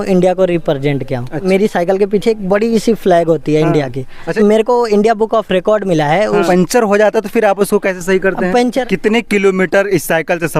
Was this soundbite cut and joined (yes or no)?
yes